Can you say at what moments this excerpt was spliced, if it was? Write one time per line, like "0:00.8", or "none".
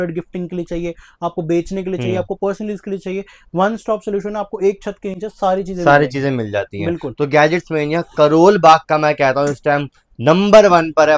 none